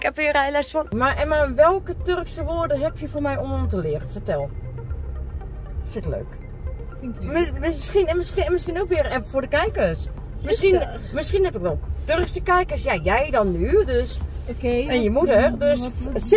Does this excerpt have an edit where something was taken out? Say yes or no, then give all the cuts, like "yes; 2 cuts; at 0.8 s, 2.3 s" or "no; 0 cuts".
yes; 1 cut; at 0.9 s